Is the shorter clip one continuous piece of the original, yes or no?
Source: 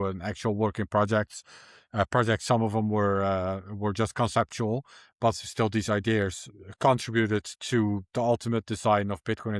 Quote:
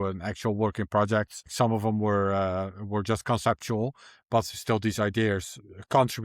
no